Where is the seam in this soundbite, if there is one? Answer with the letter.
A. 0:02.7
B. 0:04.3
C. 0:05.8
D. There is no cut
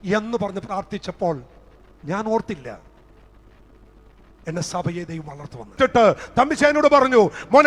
C